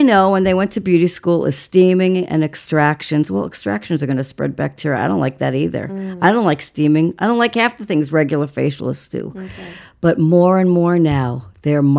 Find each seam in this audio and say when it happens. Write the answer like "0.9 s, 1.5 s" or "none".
none